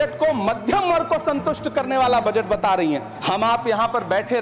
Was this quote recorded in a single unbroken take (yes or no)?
no